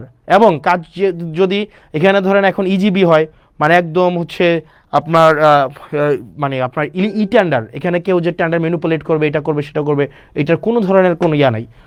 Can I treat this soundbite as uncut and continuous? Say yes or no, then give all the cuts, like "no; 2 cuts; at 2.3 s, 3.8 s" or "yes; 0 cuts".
yes; 0 cuts